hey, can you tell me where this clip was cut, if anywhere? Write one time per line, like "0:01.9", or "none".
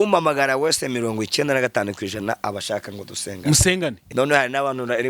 0:04.1